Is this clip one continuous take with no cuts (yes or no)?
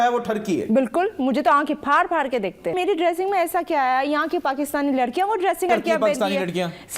no